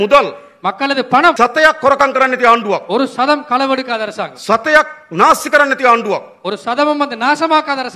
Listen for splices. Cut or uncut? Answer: cut